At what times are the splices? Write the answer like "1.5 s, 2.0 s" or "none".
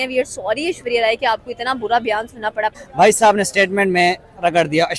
2.8 s